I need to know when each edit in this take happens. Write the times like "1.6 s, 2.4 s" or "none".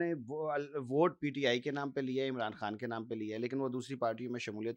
none